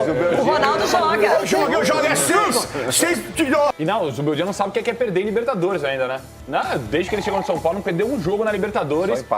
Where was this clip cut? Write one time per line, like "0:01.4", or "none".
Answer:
0:03.7